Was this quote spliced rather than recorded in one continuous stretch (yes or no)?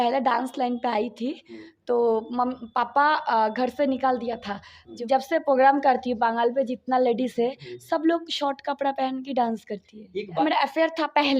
yes